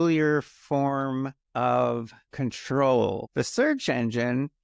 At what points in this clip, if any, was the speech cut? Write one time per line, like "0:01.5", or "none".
0:01.4
0:02.2
0:03.2